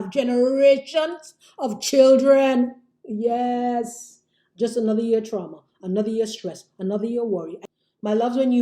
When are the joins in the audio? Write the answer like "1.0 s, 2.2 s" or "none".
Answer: 7.6 s